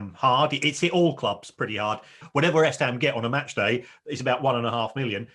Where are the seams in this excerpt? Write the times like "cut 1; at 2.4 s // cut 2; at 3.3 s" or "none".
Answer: cut 1; at 2.2 s